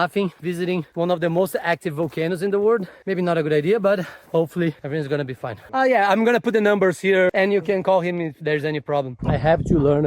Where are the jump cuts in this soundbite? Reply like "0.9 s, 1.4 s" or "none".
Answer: 5.7 s, 7.3 s, 9.2 s